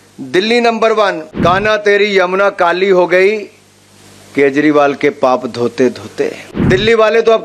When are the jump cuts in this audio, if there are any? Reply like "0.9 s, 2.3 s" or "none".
1.3 s, 6.5 s